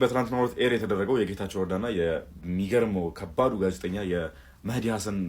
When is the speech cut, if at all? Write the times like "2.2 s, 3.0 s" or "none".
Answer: none